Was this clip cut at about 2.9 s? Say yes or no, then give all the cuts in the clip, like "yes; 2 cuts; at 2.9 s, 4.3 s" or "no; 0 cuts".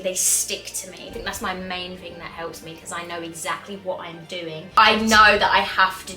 no; 2 cuts; at 1.1 s, 4.8 s